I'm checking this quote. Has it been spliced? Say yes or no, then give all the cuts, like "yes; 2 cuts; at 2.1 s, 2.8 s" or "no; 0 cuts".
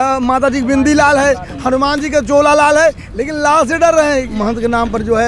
yes; 1 cut; at 4.3 s